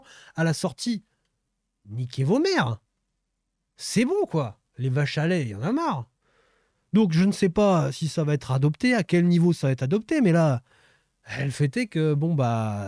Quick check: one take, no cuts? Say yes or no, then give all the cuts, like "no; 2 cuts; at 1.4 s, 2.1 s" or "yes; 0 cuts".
yes; 0 cuts